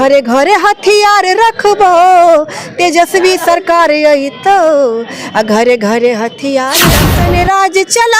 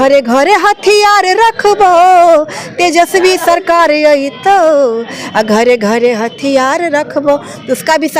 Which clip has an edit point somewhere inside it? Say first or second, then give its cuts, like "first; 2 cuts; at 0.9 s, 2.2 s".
first; 1 cut; at 7.1 s